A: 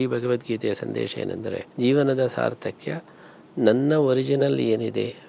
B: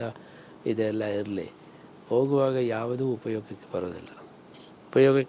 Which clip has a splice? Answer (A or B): A